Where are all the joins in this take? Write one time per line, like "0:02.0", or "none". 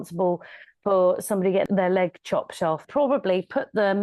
0:01.7
0:02.9